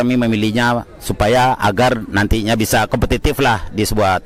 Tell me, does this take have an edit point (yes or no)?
no